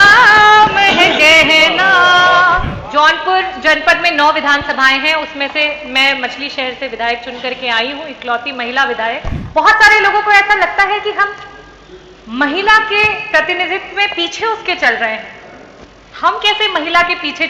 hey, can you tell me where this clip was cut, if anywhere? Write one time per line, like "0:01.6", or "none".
0:02.7
0:09.4